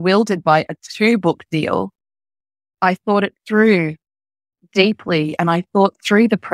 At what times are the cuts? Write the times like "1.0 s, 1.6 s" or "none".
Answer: 2.7 s